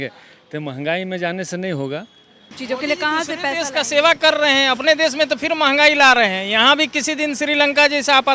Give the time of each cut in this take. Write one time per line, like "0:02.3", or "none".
0:02.6